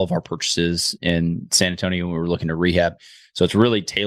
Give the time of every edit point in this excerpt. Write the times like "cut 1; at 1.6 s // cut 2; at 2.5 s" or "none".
none